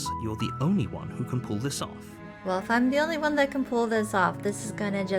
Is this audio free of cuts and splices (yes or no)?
no